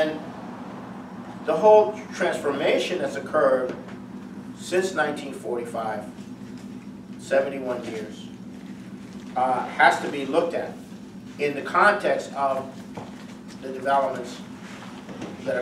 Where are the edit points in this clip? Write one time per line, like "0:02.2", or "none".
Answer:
0:08.3